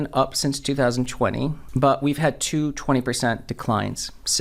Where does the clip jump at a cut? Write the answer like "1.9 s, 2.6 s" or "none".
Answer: 1.6 s